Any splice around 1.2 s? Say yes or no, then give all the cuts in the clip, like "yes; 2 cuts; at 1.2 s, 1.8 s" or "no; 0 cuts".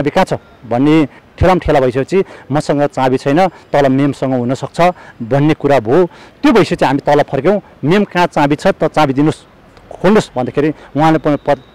yes; 2 cuts; at 1.2 s, 6.2 s